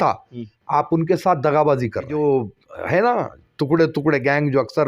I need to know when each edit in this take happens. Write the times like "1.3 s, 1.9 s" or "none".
2.1 s